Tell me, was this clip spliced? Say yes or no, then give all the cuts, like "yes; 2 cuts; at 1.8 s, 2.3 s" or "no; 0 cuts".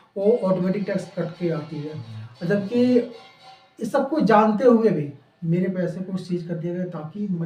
no; 0 cuts